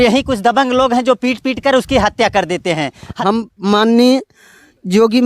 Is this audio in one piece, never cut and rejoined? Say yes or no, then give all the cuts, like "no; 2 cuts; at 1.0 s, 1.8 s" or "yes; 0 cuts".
no; 1 cut; at 3.1 s